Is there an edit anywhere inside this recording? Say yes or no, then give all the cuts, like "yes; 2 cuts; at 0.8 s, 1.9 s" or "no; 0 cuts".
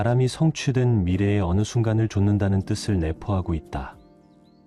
no; 0 cuts